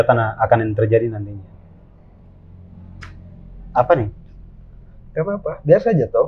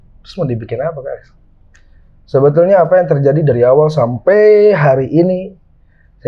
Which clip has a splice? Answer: second; 1 cut; at 1.3 s

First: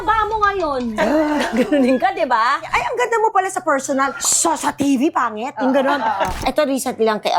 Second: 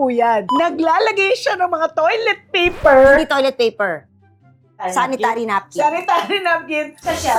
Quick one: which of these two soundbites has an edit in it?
first; 2 cuts; at 2.7 s, 6.4 s

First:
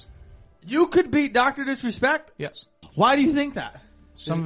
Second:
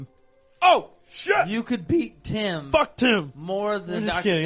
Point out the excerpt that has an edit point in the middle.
first; 1 cut; at 2.8 s

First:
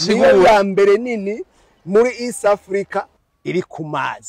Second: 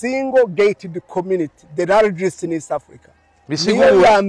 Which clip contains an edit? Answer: first; 1 cut; at 3.2 s

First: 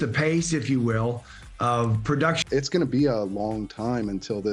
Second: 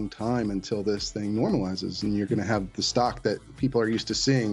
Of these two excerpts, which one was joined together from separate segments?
first; 1 cut; at 2.4 s

